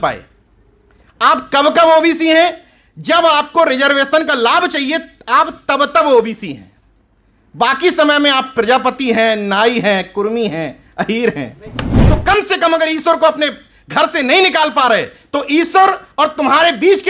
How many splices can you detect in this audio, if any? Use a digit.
1